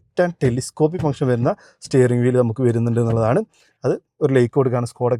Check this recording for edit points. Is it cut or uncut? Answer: uncut